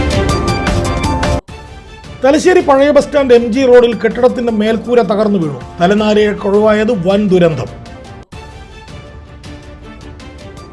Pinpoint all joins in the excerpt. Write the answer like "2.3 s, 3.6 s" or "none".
1.3 s

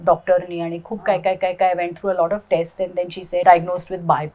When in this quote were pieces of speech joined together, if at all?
3.4 s

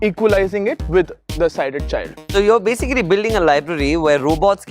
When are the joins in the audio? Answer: 2.3 s

